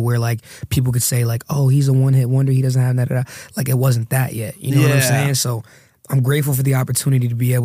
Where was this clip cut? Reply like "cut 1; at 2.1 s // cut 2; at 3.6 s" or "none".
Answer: none